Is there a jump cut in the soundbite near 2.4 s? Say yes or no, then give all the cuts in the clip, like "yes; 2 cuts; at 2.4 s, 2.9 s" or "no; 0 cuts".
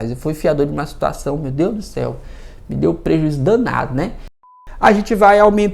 no; 1 cut; at 4.4 s